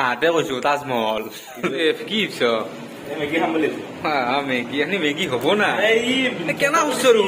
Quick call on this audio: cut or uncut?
cut